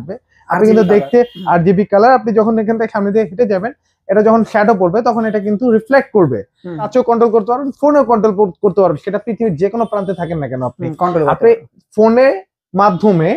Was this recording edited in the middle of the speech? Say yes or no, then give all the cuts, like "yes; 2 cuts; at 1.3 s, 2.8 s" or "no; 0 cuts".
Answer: yes; 1 cut; at 6.9 s